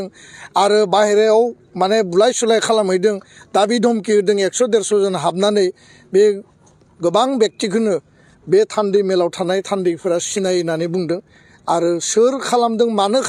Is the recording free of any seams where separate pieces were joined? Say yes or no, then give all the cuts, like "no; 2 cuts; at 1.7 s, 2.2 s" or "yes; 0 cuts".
yes; 0 cuts